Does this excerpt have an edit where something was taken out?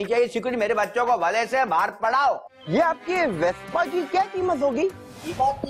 yes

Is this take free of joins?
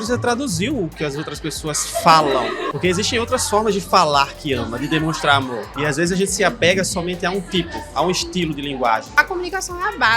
no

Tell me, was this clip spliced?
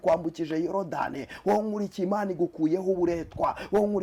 no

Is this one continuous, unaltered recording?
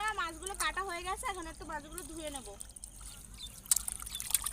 no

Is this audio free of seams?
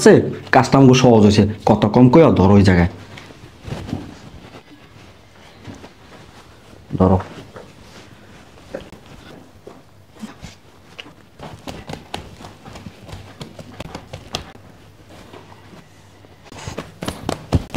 no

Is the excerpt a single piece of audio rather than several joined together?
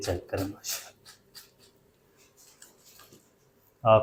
yes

